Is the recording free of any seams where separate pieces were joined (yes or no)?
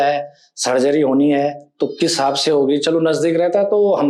yes